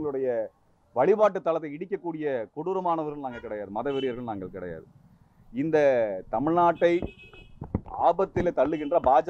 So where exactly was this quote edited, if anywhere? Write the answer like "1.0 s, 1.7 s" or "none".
none